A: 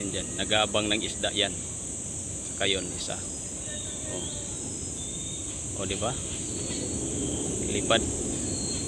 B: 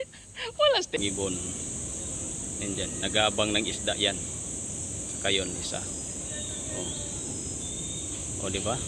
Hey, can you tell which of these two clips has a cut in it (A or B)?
B